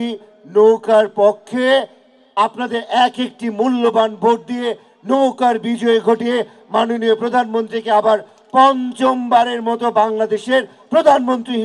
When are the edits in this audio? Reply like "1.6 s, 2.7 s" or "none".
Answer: none